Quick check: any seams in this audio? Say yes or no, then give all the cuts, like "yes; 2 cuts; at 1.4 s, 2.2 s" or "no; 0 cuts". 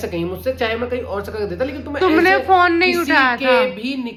no; 0 cuts